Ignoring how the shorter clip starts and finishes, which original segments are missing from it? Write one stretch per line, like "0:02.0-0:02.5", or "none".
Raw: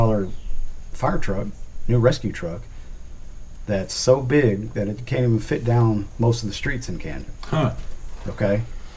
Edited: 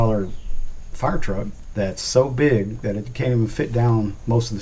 0:01.6-0:03.5